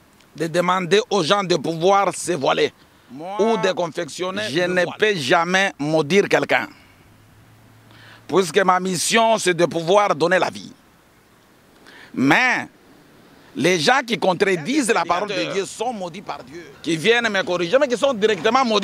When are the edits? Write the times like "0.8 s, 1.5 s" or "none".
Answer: 4.4 s, 16.3 s